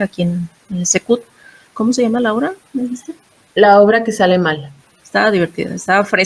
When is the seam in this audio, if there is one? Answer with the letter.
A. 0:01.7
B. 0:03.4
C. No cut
A